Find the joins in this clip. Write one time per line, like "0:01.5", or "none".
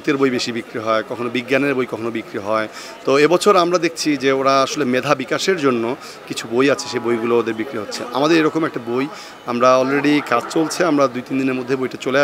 none